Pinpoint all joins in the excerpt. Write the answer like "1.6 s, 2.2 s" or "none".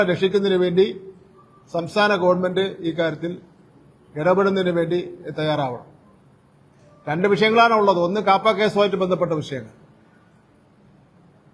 none